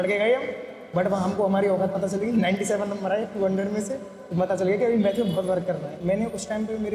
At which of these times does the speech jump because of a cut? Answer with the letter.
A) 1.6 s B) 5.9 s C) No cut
B